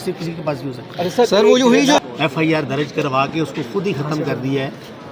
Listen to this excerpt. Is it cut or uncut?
cut